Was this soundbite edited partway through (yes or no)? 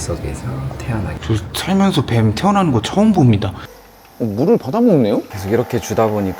yes